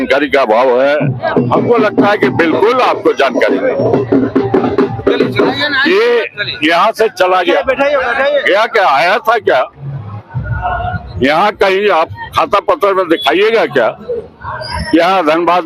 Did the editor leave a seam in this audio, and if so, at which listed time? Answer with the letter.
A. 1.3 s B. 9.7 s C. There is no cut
A